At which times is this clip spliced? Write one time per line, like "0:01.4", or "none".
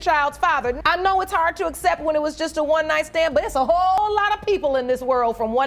0:04.0